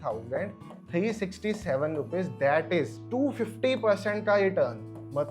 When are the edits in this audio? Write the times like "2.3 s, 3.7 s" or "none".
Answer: 3.0 s

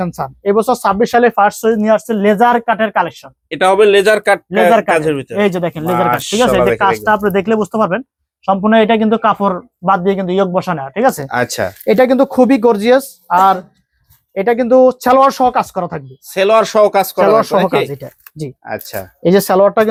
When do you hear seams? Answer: none

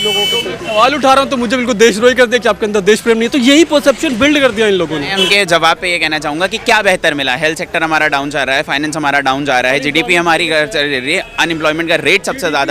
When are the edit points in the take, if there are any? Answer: 5.1 s

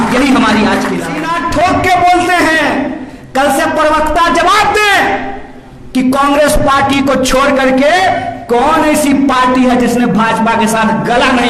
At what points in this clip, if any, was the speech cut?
1.2 s

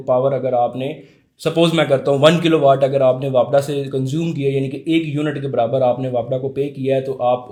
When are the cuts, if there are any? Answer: none

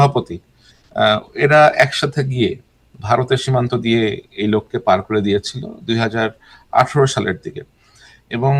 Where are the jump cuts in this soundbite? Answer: none

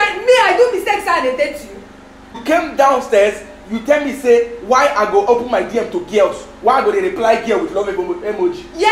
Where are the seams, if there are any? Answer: 2.2 s

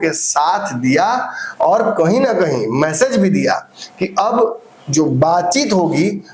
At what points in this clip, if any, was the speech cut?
none

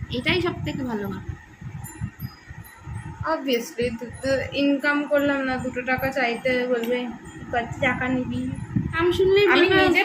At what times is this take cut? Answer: 9.0 s

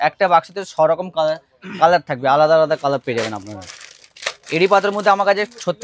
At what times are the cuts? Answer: none

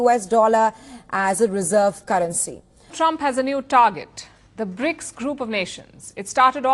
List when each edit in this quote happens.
2.9 s

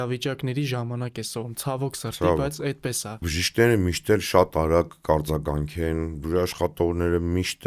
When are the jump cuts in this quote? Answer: 3.3 s

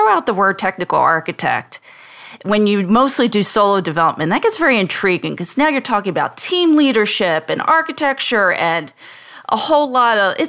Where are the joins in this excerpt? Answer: none

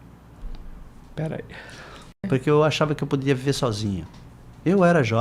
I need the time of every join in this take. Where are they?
2.2 s

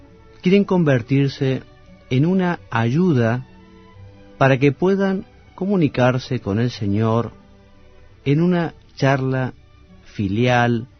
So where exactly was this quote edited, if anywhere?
none

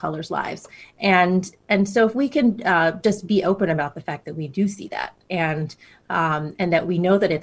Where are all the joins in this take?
none

